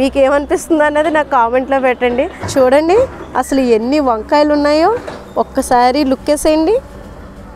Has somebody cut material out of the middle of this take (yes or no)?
yes